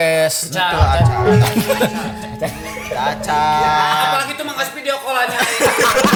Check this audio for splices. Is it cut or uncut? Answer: uncut